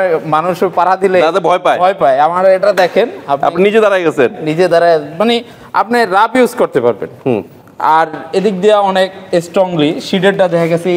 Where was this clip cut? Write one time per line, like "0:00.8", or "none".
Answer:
none